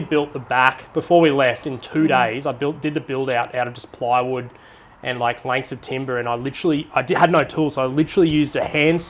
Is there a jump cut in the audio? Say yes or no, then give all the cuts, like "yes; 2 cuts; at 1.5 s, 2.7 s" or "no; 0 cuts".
no; 0 cuts